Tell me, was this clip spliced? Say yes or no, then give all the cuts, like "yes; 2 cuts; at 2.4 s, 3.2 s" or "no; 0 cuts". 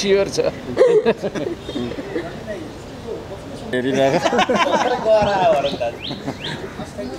no; 0 cuts